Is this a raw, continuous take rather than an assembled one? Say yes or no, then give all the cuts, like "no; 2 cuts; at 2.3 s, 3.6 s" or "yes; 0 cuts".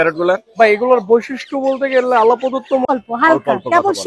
no; 1 cut; at 2.9 s